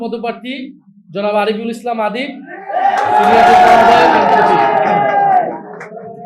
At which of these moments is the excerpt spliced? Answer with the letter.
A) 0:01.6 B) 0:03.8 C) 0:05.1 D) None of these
D